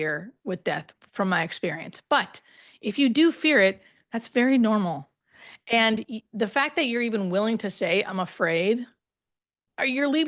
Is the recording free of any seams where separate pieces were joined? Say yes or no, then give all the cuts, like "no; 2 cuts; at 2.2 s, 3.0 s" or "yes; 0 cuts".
yes; 0 cuts